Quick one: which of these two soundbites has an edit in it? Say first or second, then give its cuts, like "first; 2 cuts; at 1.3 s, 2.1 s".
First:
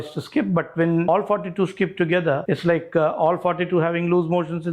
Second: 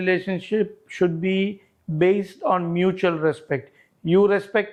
first; 2 cuts; at 1.1 s, 2.4 s